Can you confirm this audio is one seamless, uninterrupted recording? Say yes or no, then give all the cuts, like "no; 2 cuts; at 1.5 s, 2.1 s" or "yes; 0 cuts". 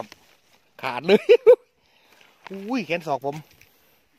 yes; 0 cuts